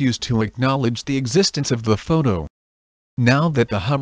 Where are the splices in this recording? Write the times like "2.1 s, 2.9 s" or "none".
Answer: none